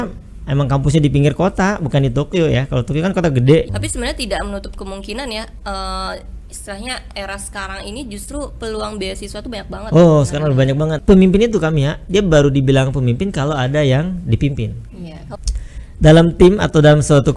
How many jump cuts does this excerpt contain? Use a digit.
3